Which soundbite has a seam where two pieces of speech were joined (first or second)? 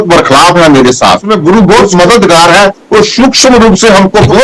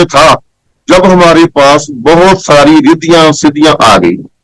first